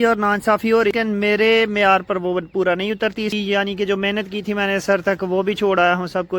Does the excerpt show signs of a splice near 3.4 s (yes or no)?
yes